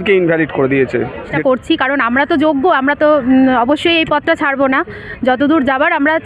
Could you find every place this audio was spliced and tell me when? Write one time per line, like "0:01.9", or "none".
0:01.3